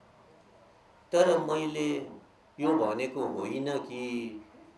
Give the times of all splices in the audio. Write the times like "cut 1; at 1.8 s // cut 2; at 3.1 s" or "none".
none